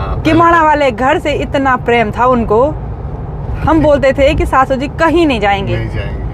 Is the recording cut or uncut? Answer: uncut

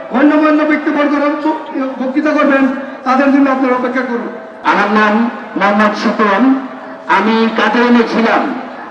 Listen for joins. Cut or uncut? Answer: cut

